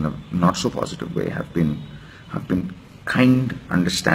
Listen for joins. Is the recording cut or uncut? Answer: uncut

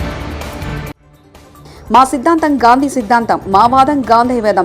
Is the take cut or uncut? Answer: cut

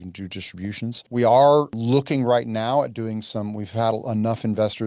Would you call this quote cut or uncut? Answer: cut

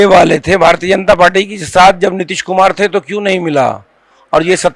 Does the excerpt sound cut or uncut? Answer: uncut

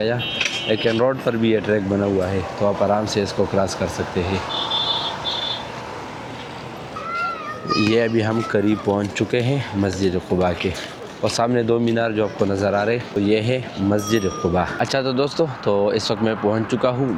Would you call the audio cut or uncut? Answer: uncut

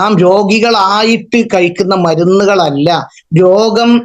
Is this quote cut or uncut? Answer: uncut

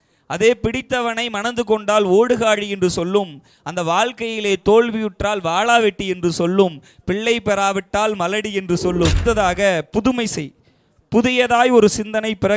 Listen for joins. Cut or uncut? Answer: cut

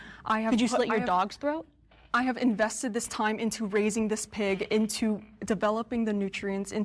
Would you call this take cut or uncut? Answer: uncut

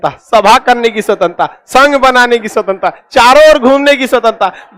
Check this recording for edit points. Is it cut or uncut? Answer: uncut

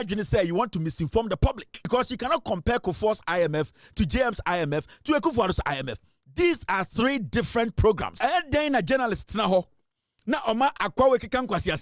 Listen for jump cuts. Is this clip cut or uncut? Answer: cut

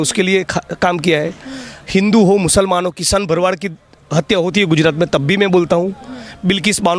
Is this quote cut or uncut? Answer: uncut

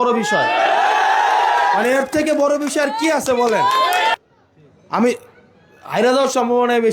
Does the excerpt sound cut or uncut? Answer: cut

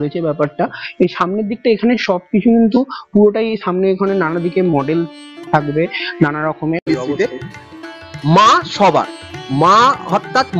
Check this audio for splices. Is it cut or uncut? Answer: cut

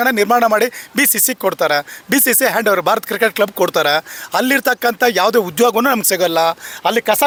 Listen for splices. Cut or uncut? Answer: uncut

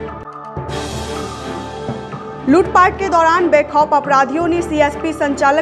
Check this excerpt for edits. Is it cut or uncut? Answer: cut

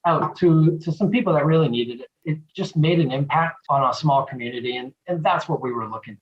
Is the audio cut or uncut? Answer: cut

